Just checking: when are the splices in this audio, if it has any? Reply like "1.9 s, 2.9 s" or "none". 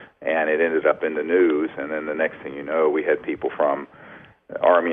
none